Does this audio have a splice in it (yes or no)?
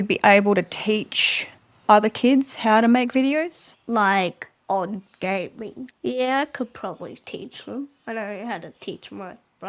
no